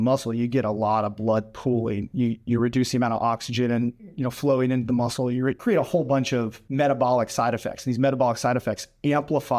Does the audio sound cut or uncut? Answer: cut